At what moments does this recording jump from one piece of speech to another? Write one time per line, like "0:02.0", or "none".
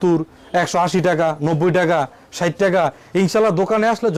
none

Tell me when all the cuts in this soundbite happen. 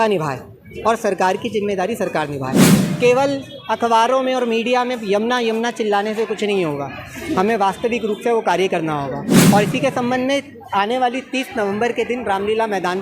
0:02.8

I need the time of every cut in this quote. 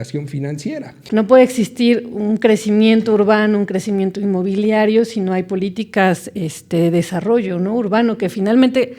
0:00.9

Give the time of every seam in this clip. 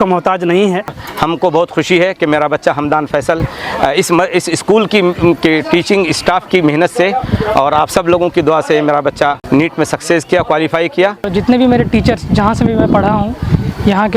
0:01.0
0:09.4
0:11.2

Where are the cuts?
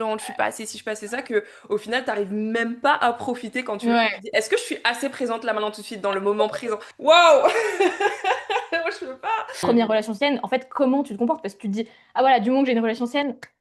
0:09.5

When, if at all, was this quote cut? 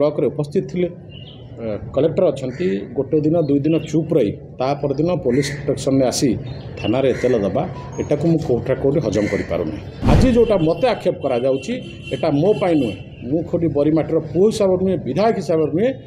0:09.9

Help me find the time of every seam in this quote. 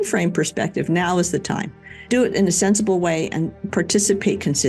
0:02.1
0:03.6

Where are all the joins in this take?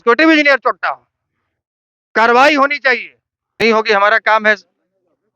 0:03.6

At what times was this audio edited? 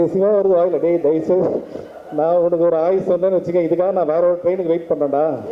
none

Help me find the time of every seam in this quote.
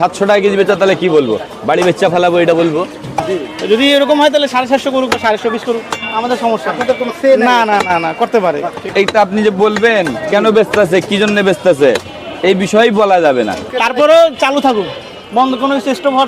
0:03.2
0:08.8
0:13.6

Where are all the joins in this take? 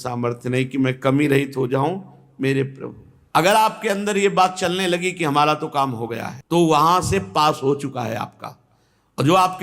0:03.1

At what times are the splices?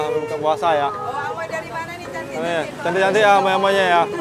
none

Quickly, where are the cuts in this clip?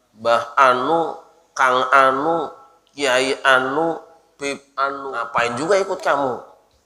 0:05.1

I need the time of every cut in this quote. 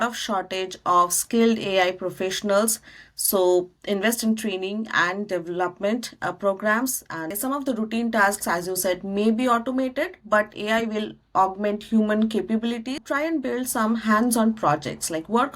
0:07.3
0:13.0

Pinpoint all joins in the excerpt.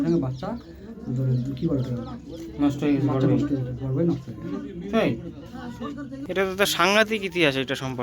0:06.2

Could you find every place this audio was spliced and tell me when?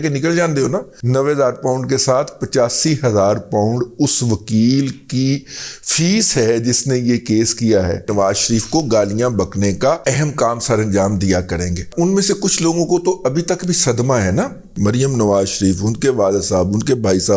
0:01.0
0:08.1
0:10.0
0:11.9
0:14.7

